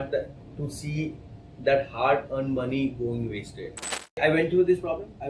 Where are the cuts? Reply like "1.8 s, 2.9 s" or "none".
4.2 s